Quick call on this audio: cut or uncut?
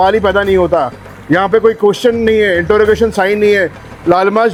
uncut